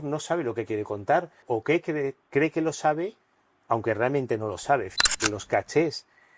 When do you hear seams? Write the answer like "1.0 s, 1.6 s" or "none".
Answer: 1.4 s, 5.1 s